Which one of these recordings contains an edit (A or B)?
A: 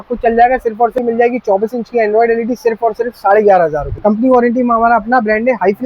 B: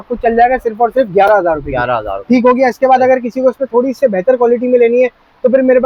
A